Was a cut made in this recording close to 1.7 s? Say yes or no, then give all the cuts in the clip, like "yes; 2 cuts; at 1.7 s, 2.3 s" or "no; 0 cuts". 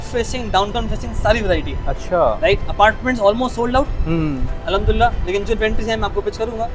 no; 0 cuts